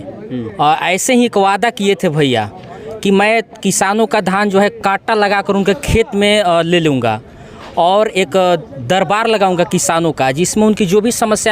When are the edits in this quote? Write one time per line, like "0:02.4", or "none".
none